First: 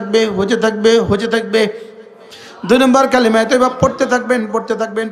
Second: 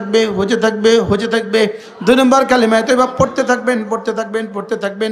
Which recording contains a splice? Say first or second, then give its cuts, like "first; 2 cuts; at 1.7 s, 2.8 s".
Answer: second; 1 cut; at 1.9 s